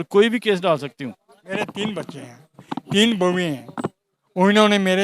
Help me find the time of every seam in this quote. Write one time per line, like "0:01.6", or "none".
0:01.4

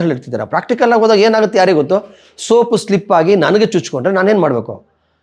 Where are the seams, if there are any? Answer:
none

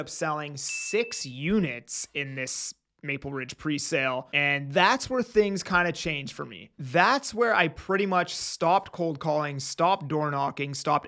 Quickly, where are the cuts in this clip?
0:04.3

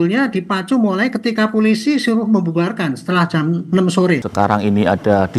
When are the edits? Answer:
0:04.3

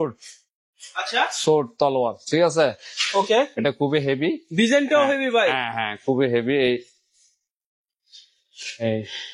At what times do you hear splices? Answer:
none

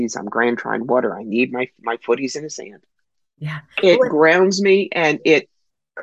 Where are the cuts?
none

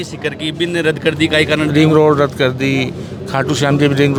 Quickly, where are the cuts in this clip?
none

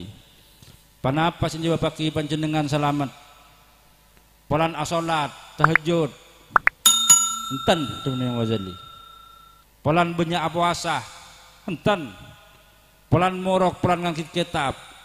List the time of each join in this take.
0:06.4
0:07.3

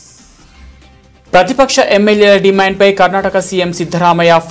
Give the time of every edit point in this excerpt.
none

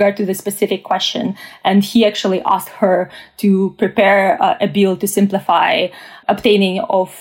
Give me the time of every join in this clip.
0:06.1

